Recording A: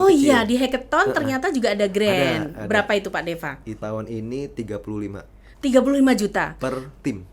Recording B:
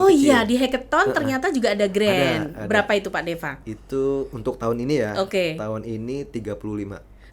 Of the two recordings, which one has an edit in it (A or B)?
A